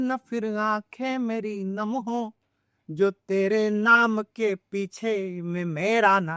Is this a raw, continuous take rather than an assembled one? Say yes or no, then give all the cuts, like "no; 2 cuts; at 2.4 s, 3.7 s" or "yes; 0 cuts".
yes; 0 cuts